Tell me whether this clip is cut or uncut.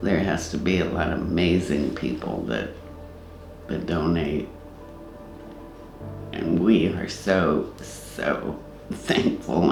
uncut